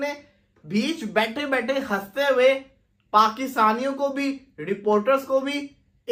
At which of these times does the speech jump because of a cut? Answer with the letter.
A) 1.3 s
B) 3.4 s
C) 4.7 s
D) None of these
D